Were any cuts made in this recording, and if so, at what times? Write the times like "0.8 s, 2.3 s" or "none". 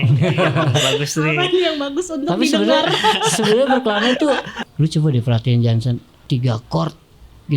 4.6 s, 6.1 s